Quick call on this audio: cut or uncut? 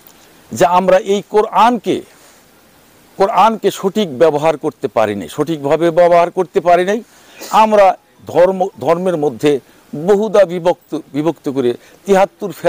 uncut